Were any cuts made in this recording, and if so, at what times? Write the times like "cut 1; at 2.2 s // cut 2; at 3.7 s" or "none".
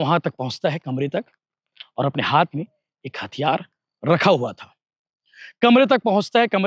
none